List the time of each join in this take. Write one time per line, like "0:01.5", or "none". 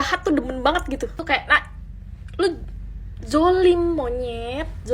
0:01.2